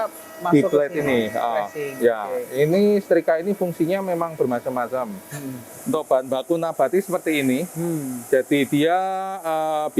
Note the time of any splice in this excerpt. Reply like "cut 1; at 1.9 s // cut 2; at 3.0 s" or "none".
cut 1; at 5.7 s